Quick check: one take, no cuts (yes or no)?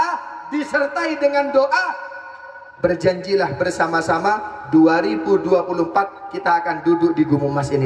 yes